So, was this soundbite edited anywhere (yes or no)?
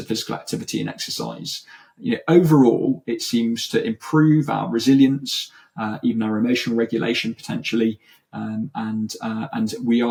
no